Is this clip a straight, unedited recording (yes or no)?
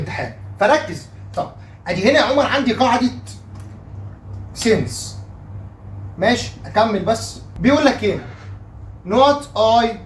yes